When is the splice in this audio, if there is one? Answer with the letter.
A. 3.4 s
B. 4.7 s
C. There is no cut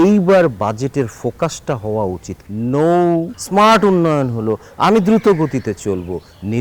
A